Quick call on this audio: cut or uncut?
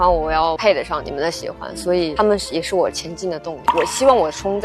cut